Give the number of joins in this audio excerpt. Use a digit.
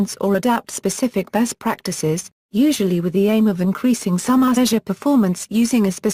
0